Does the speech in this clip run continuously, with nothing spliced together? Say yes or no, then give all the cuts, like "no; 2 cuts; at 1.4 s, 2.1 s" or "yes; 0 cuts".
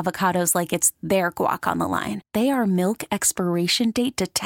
yes; 0 cuts